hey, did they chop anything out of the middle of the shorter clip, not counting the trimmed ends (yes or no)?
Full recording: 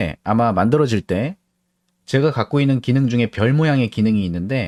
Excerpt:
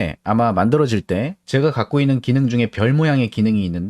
yes